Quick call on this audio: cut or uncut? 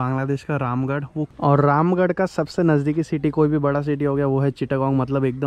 uncut